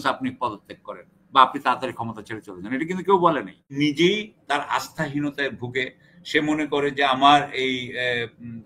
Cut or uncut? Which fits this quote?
cut